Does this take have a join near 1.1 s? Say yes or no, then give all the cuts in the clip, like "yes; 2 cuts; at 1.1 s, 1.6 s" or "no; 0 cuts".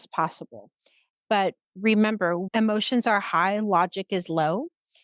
yes; 1 cut; at 1.1 s